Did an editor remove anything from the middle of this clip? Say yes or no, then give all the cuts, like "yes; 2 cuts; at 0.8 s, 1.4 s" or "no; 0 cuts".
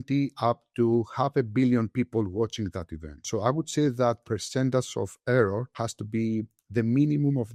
no; 0 cuts